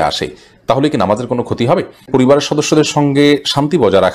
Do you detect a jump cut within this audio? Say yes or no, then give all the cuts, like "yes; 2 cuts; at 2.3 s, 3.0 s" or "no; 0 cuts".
yes; 1 cut; at 2.1 s